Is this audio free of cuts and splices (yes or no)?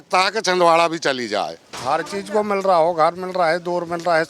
no